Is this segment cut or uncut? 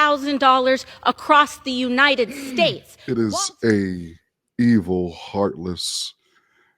cut